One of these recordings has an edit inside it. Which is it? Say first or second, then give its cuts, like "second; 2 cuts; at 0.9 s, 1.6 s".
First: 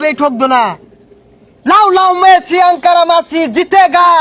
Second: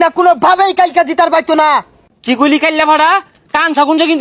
second; 1 cut; at 2.0 s